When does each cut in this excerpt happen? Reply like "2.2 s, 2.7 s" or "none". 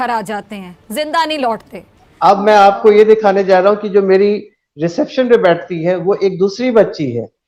none

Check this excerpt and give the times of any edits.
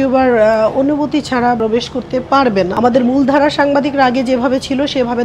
1.6 s, 2.7 s

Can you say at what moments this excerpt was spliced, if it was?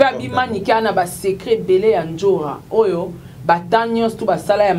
none

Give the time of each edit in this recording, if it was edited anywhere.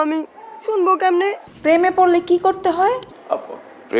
1.4 s

